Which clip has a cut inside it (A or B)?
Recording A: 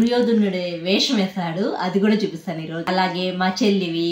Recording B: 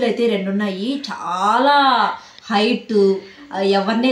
A